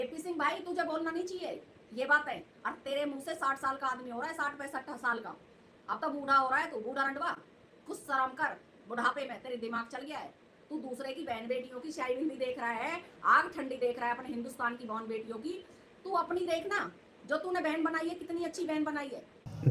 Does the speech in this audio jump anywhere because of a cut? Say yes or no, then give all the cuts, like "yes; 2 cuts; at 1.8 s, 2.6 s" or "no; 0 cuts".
no; 0 cuts